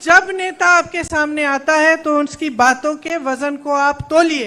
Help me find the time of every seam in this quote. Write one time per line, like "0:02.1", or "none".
none